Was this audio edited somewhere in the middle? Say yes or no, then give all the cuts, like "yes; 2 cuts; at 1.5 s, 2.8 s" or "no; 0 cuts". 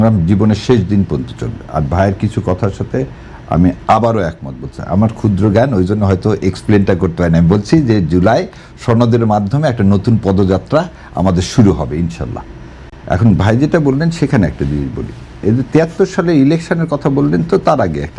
no; 0 cuts